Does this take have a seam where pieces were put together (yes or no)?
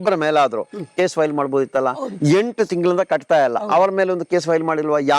no